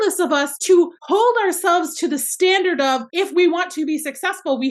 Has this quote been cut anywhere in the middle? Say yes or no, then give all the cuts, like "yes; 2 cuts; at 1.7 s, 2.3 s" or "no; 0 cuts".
no; 0 cuts